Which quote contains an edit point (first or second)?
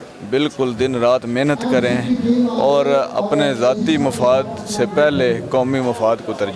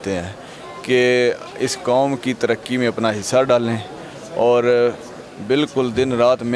first